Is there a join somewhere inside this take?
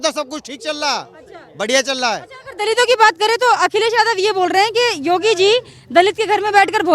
no; 0 cuts

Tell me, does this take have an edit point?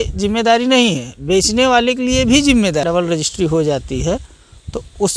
yes; 1 cut; at 2.8 s

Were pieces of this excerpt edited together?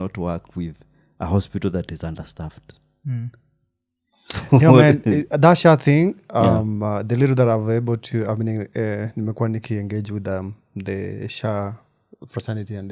no; 0 cuts

